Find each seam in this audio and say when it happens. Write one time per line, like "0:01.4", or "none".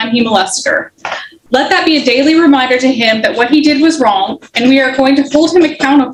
none